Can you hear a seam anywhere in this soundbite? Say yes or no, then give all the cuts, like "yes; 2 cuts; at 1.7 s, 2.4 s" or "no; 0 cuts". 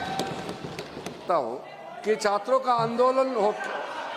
yes; 1 cut; at 1.2 s